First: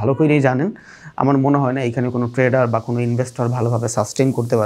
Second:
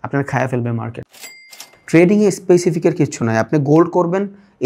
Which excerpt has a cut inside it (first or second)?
second